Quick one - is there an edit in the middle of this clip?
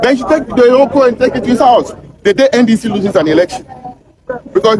no; 0 cuts

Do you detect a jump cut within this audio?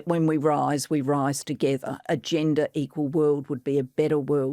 yes; 1 cut; at 1.5 s

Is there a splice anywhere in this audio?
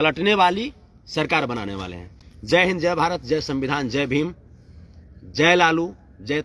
no; 0 cuts

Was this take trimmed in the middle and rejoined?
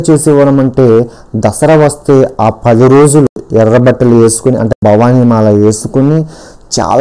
no; 0 cuts

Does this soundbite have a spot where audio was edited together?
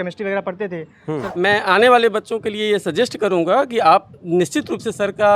yes; 1 cut; at 1.0 s

